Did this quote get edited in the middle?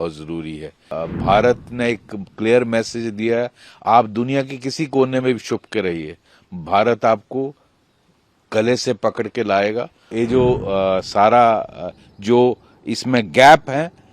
yes; 2 cuts; at 1.0 s, 10.1 s

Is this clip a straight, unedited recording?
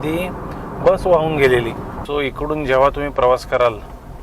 no; 1 cut; at 1.9 s

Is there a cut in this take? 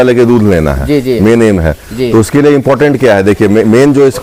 no; 0 cuts

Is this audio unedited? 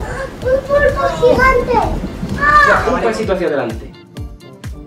no; 1 cut; at 2.8 s

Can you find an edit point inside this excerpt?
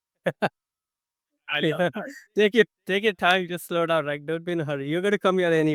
no; 0 cuts

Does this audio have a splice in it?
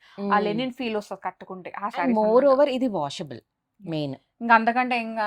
no; 0 cuts

